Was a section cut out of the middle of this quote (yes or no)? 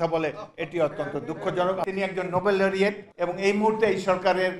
yes